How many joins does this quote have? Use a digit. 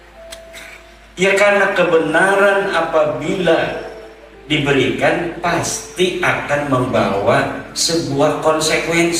0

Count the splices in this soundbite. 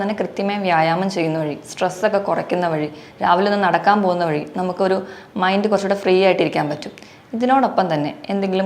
0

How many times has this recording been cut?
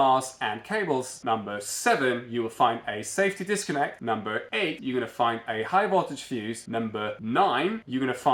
0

